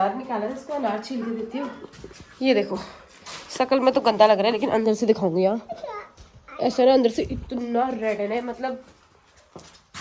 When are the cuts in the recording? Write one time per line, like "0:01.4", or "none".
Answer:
none